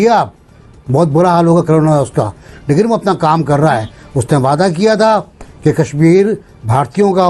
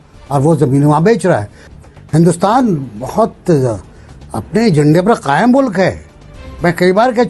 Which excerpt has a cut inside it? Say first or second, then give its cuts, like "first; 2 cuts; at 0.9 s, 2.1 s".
second; 1 cut; at 1.6 s